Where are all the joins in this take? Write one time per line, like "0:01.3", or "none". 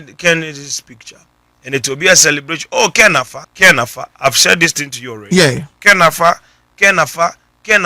0:03.4